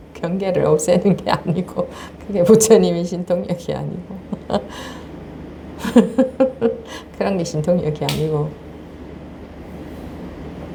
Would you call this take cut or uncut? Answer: uncut